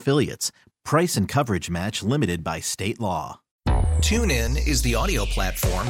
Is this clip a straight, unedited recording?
no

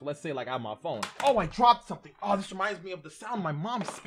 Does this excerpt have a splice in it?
yes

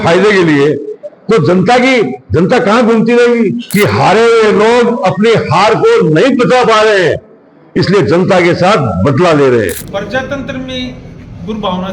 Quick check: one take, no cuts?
no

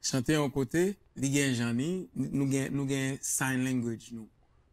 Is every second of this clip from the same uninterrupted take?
no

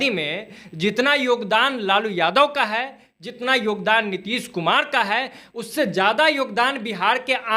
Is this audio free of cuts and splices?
yes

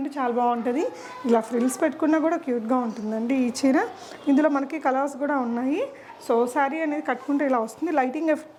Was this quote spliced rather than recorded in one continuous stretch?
no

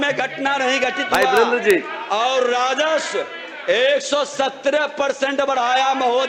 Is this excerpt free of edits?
yes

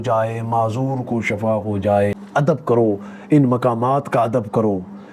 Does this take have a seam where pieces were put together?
yes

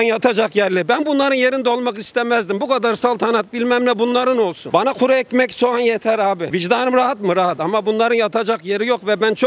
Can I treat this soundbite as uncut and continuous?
yes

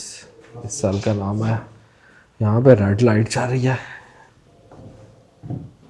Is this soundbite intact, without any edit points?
yes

